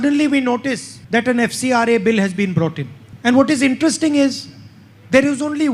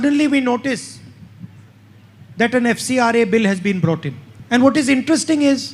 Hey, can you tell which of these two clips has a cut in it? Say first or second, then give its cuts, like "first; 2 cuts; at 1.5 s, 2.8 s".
first; 1 cut; at 0.9 s